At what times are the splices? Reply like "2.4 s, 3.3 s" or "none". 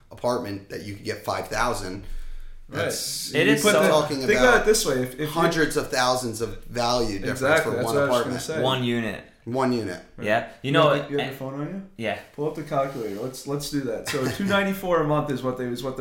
none